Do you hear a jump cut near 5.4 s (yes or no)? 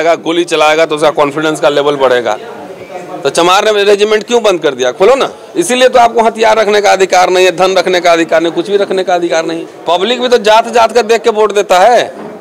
yes